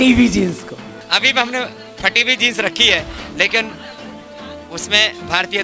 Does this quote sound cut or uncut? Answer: cut